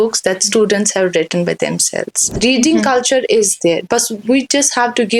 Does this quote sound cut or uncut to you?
cut